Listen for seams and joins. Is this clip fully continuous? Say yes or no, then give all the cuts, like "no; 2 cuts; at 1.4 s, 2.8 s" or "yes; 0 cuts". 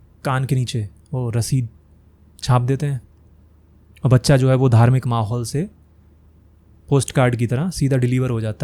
yes; 0 cuts